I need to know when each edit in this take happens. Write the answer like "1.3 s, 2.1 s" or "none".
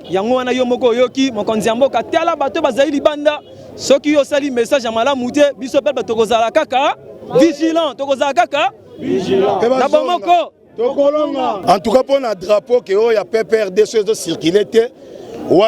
11.6 s